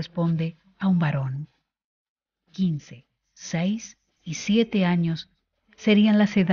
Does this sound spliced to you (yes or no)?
yes